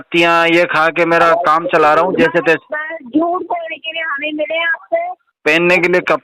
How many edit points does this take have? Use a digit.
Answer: 1